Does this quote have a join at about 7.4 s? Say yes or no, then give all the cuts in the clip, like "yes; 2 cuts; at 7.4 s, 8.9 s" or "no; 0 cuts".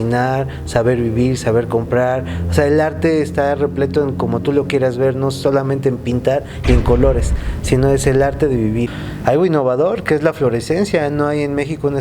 no; 1 cut; at 9.0 s